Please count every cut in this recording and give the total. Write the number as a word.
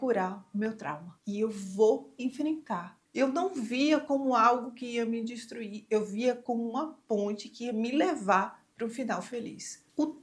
one